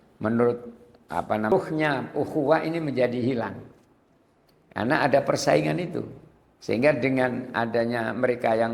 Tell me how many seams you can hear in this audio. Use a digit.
1